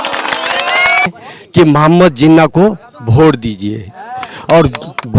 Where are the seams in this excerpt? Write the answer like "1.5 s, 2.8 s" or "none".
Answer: 1.0 s